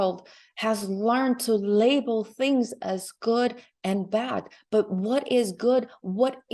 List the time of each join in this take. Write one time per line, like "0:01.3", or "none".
none